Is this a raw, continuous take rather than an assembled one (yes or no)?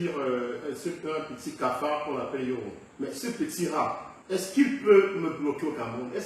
no